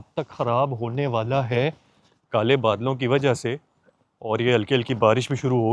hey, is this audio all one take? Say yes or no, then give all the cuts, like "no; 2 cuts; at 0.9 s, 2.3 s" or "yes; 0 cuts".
yes; 0 cuts